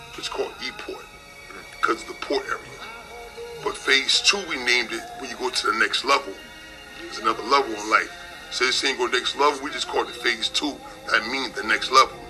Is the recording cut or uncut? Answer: uncut